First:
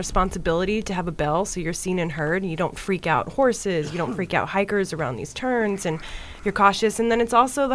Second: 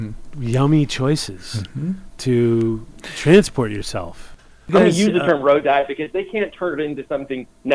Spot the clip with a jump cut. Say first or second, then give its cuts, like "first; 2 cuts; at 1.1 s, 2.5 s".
second; 1 cut; at 4.6 s